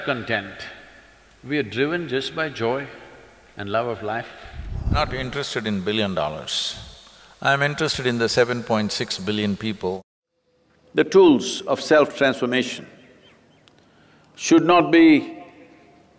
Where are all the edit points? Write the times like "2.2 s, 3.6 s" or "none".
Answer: 4.9 s, 10.0 s